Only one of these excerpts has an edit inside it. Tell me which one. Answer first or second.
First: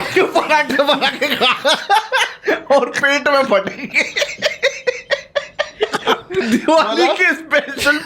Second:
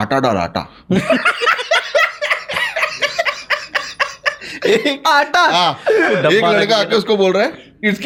first